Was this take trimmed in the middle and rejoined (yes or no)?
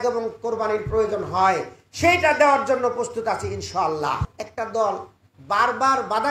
yes